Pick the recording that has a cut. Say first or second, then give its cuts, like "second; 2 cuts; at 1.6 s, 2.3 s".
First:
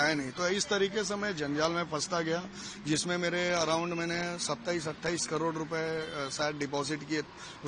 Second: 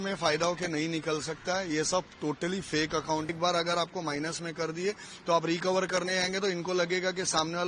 second; 1 cut; at 3.3 s